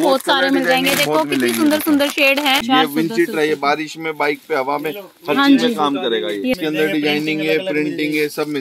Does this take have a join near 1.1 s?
no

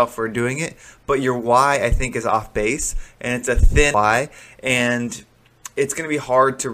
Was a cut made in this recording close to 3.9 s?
yes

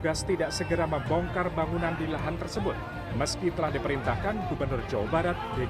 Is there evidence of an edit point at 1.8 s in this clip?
no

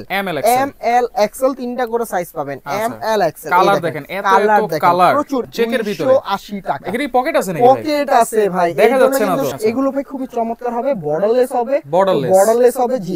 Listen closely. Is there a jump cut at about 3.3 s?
no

